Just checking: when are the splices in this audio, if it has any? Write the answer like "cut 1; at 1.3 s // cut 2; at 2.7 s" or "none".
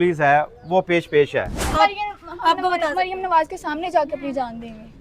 cut 1; at 1.7 s

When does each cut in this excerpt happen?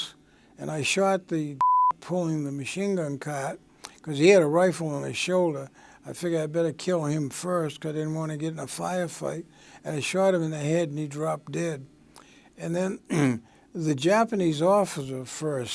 none

